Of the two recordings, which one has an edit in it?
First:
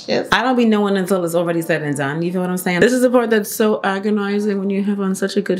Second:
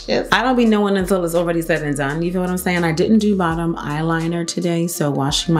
first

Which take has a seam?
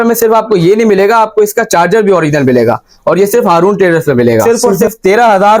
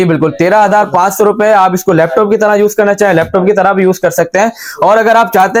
first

